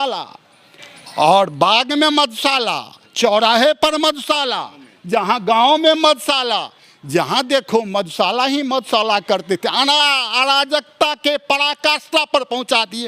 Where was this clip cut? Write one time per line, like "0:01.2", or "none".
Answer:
none